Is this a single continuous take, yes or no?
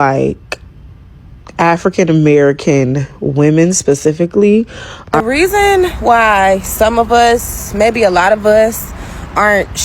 no